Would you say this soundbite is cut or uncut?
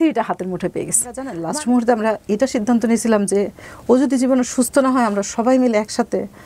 cut